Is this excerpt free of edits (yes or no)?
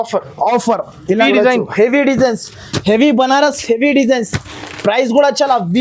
no